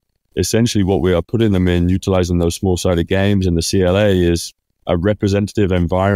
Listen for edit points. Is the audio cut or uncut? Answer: uncut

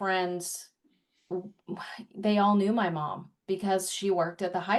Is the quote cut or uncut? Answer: uncut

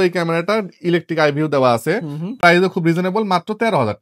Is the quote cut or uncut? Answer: uncut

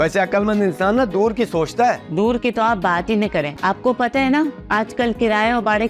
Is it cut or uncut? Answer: uncut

